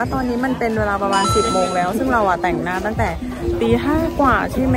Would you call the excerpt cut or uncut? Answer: uncut